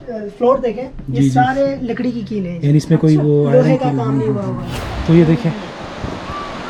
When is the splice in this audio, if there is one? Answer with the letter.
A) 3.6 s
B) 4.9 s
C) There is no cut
B